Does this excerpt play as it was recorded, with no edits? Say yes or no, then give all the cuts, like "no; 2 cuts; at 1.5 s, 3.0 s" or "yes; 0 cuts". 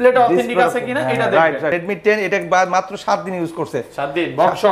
no; 1 cut; at 1.7 s